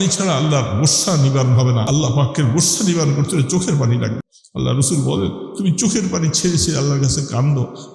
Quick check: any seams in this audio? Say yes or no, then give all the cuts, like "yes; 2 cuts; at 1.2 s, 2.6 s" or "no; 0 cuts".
yes; 2 cuts; at 1.8 s, 4.3 s